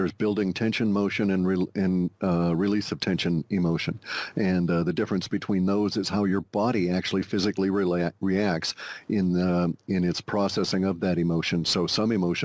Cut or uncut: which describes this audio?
uncut